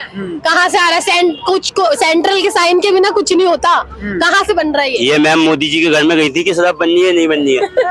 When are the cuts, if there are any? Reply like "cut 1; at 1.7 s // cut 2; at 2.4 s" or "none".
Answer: none